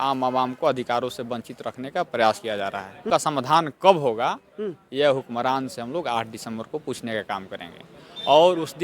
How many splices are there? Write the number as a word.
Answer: one